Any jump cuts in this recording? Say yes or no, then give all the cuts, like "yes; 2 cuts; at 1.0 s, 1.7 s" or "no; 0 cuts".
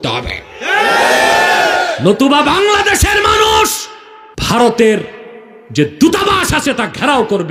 yes; 1 cut; at 4.6 s